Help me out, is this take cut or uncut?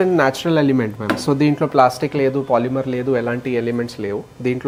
uncut